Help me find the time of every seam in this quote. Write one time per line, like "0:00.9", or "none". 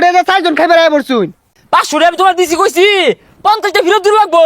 0:01.5

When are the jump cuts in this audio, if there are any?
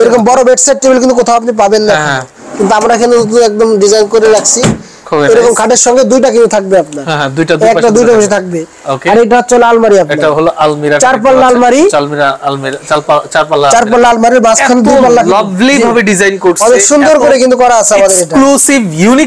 none

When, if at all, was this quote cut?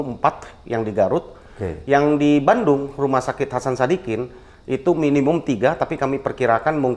none

